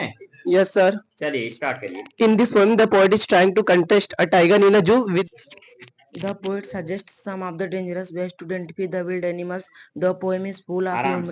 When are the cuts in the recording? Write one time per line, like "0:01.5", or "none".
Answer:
0:05.1